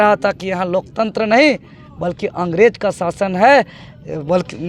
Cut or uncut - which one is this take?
uncut